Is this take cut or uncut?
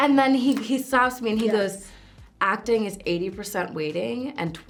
uncut